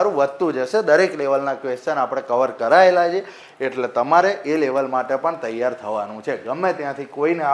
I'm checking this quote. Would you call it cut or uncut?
uncut